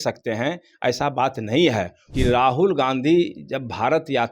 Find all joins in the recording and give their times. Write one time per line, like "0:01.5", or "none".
0:02.0